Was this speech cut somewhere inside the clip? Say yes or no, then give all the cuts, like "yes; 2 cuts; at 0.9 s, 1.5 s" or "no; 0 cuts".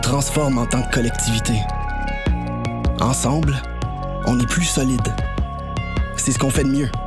no; 0 cuts